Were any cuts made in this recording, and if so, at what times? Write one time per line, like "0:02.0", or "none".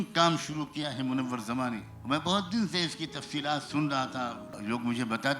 0:01.9
0:04.4

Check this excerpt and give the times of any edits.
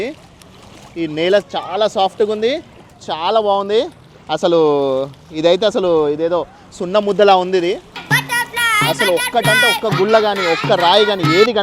0:00.9

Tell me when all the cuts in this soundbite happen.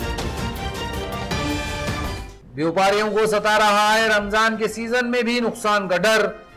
none

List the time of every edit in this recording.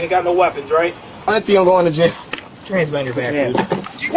0:01.1

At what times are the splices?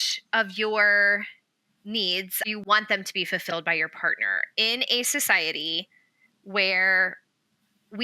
0:02.5

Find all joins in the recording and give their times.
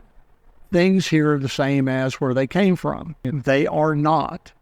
0:03.1

